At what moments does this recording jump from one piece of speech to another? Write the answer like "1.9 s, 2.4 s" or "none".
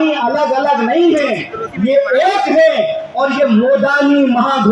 none

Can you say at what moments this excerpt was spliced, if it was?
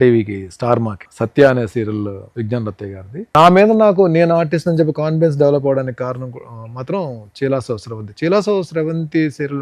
2.2 s, 3.3 s

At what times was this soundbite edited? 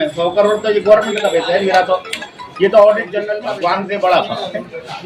3.3 s

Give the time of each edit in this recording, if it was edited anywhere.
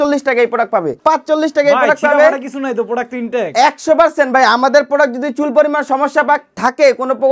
1.0 s

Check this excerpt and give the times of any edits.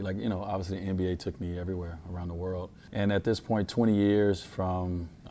2.8 s

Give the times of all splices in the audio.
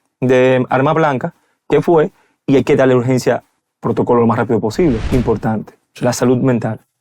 5.0 s

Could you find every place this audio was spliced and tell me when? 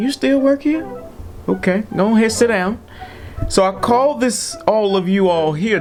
none

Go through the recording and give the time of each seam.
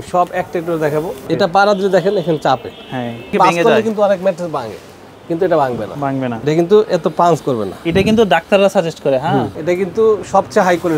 1.2 s, 3.3 s, 6.4 s, 9.5 s

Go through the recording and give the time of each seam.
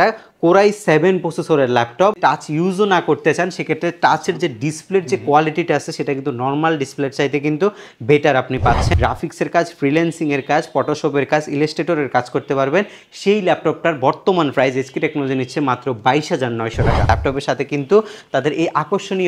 2.2 s, 9.0 s, 17.1 s

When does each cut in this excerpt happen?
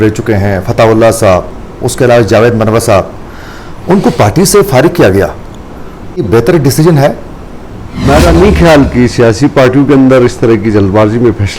6.2 s, 8.0 s

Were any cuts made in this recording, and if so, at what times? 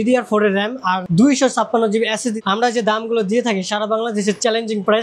1.0 s, 2.4 s

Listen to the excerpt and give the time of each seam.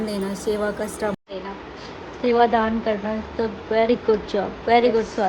none

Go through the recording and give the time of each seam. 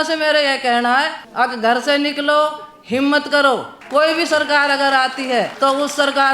1.2 s, 3.7 s, 5.5 s

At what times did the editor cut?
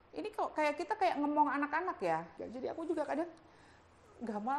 2.3 s

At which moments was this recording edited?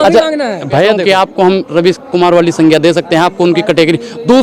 1.0 s

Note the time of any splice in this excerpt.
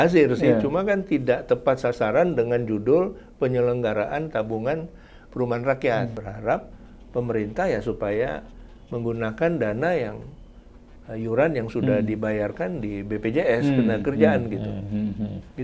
6.3 s

